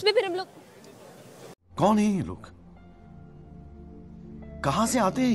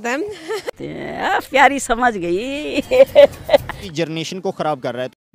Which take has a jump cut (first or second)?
second